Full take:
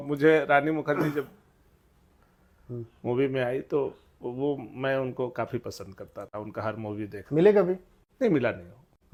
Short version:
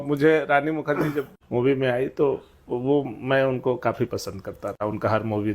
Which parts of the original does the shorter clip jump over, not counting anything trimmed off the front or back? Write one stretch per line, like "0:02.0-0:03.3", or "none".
0:01.4-0:02.9